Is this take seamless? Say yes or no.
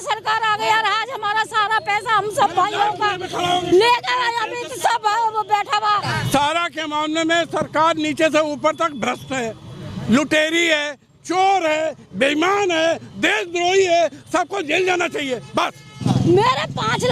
no